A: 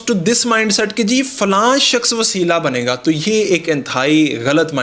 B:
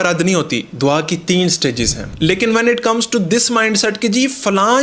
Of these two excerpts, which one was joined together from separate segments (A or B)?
B